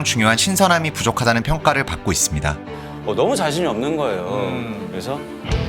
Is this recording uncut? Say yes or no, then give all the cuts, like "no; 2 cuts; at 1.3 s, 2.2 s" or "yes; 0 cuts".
no; 1 cut; at 2.7 s